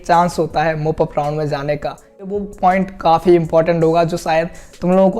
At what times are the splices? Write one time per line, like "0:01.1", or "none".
0:02.4